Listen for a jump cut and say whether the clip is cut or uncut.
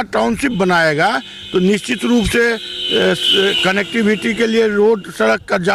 uncut